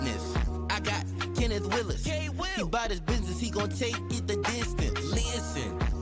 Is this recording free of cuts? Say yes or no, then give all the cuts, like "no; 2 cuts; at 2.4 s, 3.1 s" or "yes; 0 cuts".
yes; 0 cuts